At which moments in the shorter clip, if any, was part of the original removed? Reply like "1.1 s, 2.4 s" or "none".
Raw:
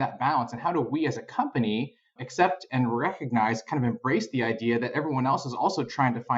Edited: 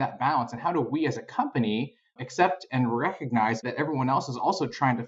3.7 s